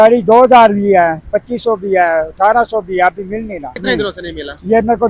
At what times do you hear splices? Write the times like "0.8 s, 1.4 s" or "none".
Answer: 3.8 s